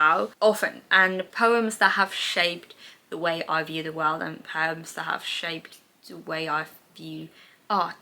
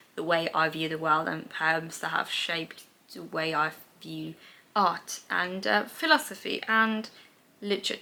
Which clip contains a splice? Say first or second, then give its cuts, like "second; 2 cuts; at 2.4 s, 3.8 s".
first; 1 cut; at 1.3 s